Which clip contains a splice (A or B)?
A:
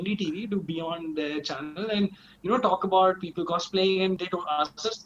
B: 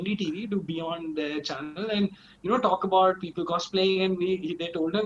A